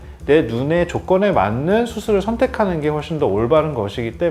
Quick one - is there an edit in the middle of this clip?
no; 0 cuts

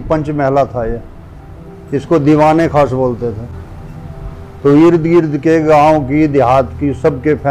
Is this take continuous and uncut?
yes; 0 cuts

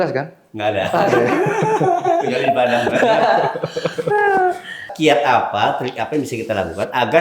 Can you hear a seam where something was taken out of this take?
yes; 1 cut; at 4.9 s

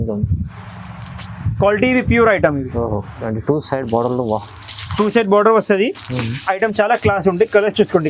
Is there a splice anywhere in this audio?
yes; 1 cut; at 3.3 s

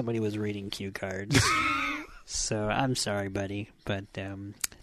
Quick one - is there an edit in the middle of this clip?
no; 0 cuts

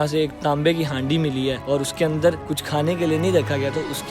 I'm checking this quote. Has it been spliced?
yes; 2 cuts; at 1.6 s, 2.5 s

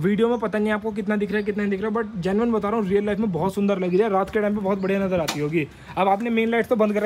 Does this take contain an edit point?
no; 0 cuts

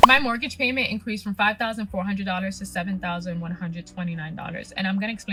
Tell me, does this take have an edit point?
no; 0 cuts

